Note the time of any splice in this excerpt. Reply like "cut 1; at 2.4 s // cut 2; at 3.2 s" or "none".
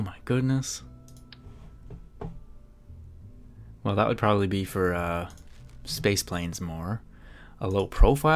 none